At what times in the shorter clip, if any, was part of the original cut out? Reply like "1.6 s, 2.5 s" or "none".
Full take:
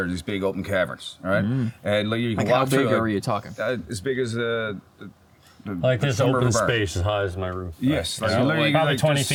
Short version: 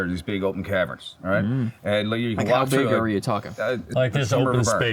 3.9 s